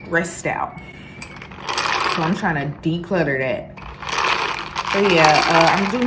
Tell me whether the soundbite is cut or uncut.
uncut